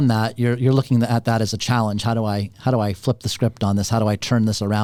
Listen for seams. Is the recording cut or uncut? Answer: uncut